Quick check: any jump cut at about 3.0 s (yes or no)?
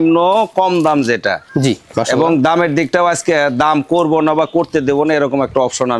no